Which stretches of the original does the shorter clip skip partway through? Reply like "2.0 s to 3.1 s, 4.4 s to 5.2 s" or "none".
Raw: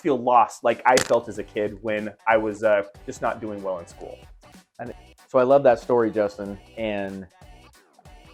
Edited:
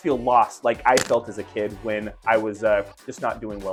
none